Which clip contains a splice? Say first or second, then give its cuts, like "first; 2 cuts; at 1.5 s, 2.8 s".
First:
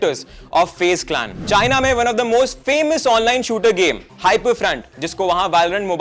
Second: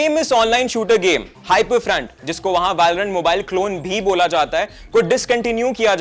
first; 1 cut; at 1.3 s